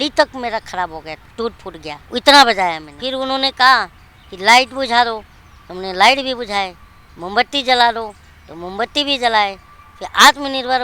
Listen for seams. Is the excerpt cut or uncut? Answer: cut